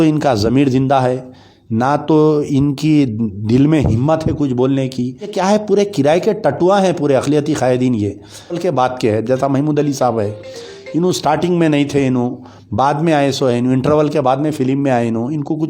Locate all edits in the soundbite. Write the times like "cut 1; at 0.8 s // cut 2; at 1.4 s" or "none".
cut 1; at 5.3 s // cut 2; at 8.6 s